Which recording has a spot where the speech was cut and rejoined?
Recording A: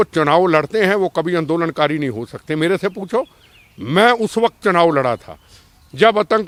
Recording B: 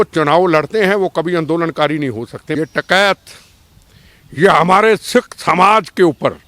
B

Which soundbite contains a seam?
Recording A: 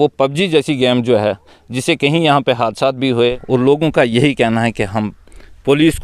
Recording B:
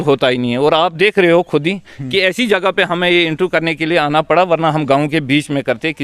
A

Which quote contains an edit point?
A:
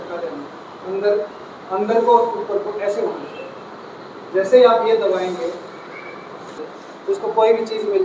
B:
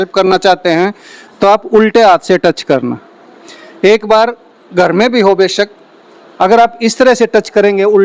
A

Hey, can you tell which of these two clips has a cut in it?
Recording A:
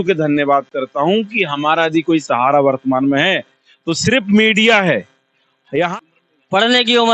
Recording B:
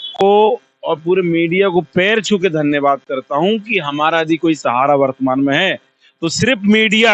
A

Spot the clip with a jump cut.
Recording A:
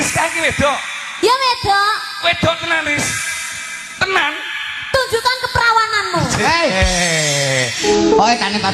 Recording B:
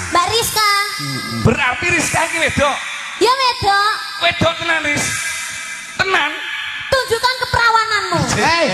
A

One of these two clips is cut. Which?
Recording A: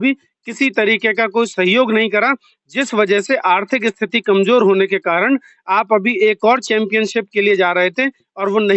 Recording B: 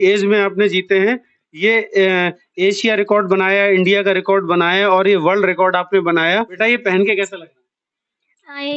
B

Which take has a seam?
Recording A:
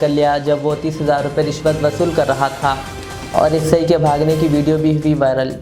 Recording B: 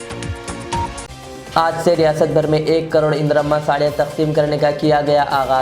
B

